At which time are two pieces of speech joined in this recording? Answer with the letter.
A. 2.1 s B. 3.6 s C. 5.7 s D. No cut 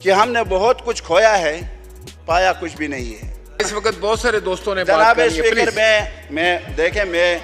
B